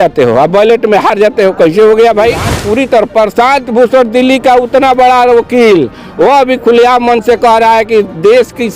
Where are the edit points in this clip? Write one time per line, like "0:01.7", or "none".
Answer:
0:02.5